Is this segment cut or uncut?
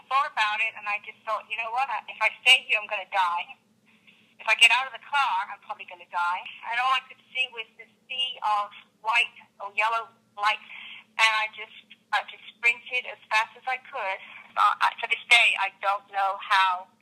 cut